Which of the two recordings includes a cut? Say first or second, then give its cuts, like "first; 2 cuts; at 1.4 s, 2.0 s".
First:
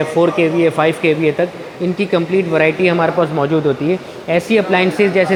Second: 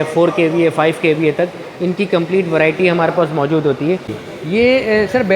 second; 1 cut; at 4.1 s